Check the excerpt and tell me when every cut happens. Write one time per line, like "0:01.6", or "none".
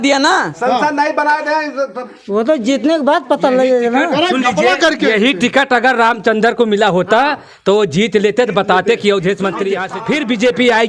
0:09.9